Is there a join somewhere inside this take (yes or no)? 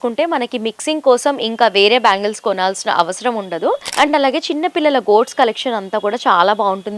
yes